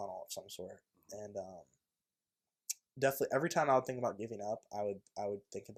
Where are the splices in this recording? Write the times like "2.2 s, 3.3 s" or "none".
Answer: none